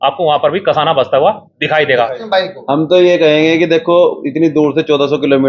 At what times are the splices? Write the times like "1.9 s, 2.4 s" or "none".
2.2 s